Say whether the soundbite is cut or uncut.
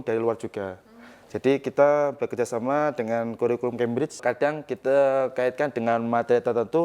cut